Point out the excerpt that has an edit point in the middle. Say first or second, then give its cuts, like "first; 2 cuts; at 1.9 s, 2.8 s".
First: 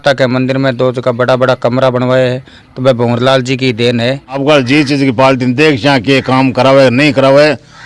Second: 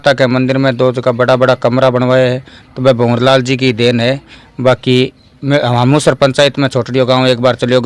first; 1 cut; at 4.4 s